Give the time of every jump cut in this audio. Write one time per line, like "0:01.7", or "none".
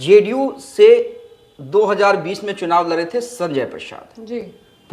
none